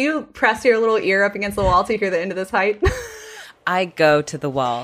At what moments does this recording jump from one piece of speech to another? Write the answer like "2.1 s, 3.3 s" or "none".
3.5 s